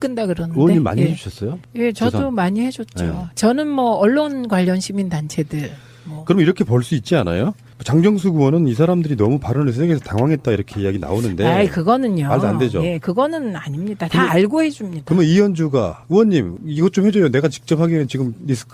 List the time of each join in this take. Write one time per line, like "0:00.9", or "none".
0:10.8